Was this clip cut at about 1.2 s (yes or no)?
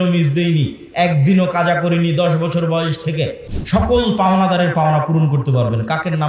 no